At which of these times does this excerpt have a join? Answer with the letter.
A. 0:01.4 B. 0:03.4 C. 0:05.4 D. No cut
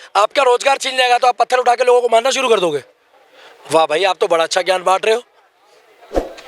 D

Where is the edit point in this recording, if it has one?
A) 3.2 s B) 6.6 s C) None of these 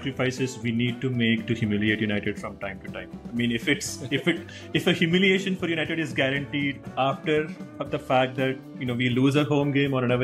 C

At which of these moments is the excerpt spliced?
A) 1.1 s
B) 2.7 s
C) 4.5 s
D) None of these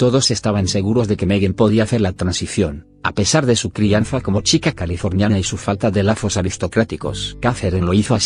C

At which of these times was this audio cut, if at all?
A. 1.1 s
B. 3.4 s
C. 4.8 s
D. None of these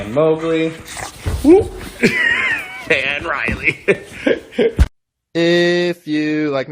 C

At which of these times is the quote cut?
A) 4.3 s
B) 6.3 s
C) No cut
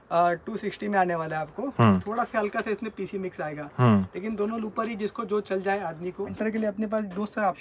B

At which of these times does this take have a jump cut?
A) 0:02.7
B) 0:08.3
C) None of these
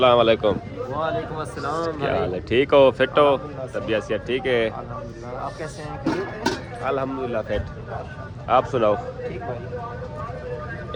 C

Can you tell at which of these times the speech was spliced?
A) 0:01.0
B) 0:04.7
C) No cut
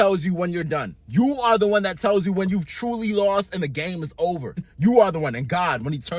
B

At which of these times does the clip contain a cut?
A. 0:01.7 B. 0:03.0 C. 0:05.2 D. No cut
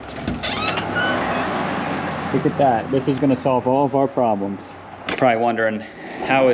C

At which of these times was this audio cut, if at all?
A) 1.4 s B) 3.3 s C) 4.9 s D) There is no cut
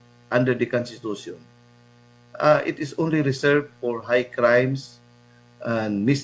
D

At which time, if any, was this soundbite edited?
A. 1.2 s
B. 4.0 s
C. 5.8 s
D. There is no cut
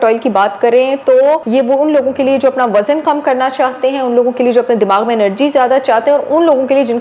A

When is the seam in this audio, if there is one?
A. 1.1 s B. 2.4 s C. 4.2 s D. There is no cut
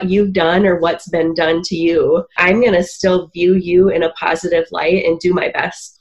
B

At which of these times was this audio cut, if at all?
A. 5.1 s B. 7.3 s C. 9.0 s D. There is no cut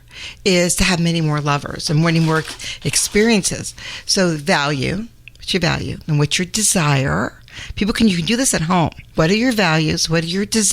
C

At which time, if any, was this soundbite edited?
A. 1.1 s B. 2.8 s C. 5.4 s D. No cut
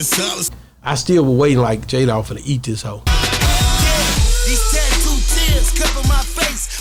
D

